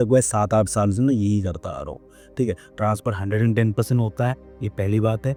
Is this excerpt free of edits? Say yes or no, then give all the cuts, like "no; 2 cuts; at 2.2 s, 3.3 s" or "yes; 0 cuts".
yes; 0 cuts